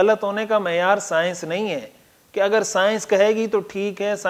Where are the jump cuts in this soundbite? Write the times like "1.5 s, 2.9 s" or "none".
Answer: none